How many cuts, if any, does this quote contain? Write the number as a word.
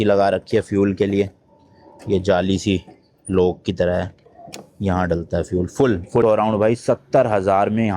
one